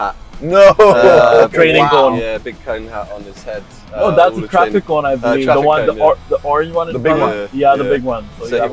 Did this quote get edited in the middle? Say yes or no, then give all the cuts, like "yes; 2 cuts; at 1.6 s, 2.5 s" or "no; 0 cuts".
no; 0 cuts